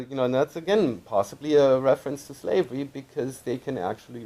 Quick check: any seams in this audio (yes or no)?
yes